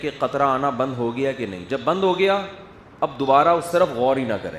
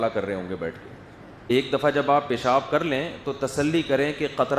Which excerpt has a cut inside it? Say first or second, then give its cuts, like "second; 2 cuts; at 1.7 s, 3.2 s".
second; 1 cut; at 1.5 s